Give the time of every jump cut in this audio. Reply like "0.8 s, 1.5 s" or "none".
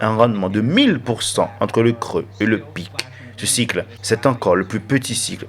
4.0 s

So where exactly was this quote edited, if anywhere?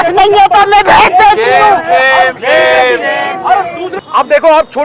3.9 s

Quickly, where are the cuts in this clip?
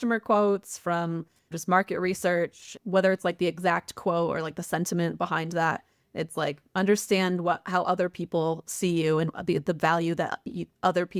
none

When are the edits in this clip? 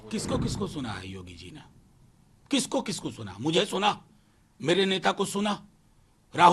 none

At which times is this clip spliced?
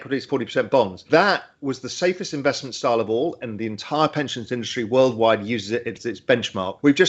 none

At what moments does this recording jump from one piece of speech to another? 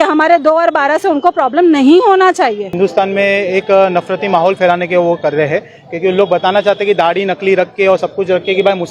2.7 s

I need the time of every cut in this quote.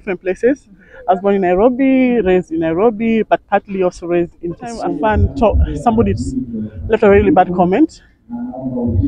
4.9 s

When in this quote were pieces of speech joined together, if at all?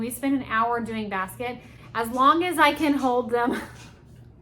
1.8 s

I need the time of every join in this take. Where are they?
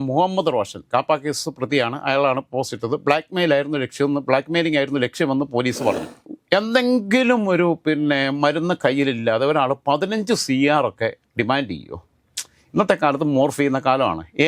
6.2 s

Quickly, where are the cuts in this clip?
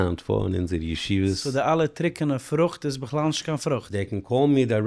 1.4 s, 3.9 s

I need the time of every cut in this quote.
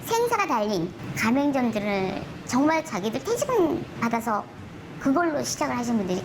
1.0 s, 2.3 s, 3.9 s

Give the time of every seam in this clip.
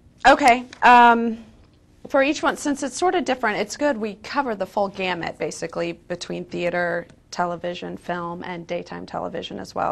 none

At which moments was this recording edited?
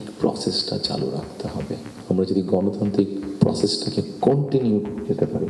1.9 s

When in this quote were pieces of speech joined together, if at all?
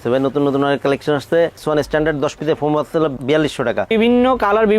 1.6 s, 3.9 s

